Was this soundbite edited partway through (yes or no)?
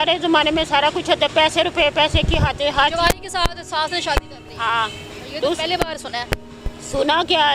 no